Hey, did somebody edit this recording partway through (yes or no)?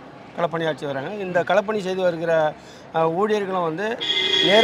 no